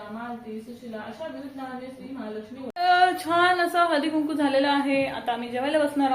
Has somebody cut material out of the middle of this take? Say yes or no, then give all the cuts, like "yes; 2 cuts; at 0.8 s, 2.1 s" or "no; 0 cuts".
yes; 1 cut; at 2.7 s